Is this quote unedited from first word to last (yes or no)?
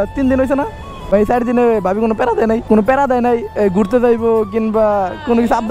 no